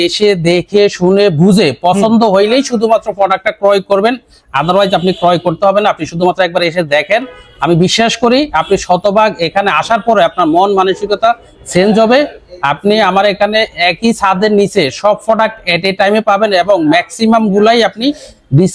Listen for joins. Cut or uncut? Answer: uncut